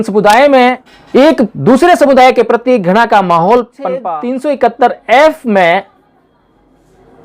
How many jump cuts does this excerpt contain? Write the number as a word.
two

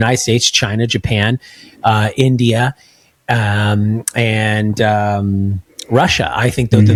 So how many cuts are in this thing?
zero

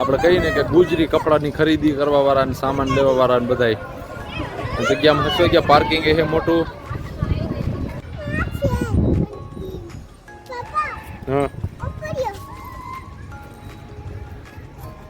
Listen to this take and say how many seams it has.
one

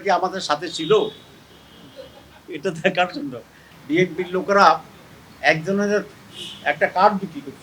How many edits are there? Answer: one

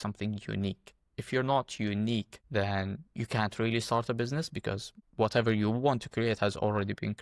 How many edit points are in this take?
one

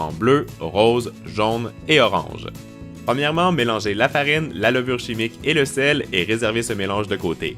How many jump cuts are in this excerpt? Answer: one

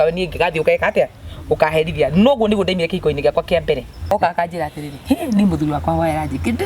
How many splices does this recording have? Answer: one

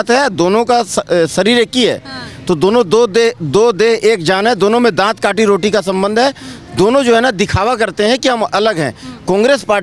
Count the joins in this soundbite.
zero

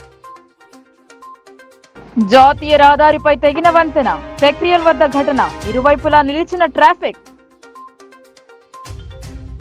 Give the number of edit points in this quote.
zero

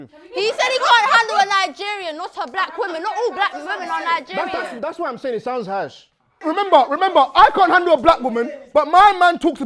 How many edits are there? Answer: one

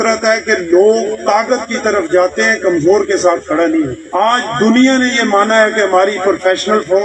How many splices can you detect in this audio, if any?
zero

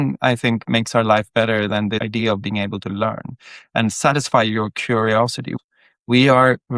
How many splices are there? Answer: one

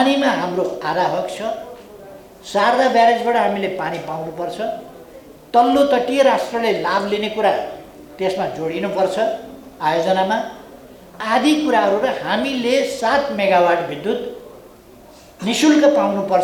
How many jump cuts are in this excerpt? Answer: zero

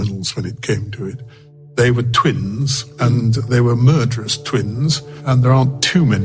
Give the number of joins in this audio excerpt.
three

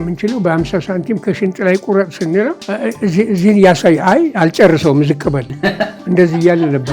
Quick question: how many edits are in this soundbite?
one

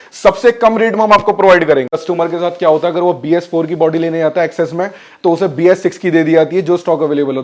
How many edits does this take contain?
one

